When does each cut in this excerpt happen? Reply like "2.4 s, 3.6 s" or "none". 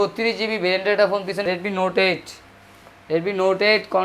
1.4 s